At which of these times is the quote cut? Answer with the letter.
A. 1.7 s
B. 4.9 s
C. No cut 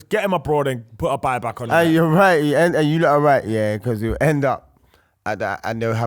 A